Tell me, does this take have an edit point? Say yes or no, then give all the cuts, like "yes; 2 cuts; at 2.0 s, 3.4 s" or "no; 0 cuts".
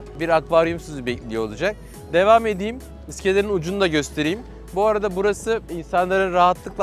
no; 0 cuts